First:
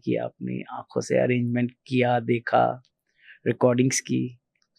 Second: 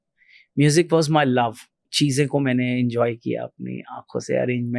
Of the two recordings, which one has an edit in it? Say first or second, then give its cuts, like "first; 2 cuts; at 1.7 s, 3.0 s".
second; 1 cut; at 1.9 s